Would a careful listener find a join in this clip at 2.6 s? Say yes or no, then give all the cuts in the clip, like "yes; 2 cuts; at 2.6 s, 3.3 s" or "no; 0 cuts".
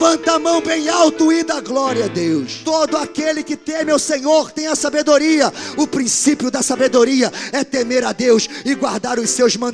yes; 1 cut; at 2.6 s